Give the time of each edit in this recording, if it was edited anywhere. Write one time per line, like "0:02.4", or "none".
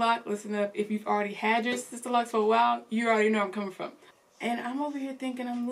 0:04.0